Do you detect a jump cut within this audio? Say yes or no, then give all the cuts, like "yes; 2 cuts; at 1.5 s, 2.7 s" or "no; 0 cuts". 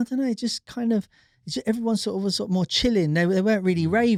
no; 0 cuts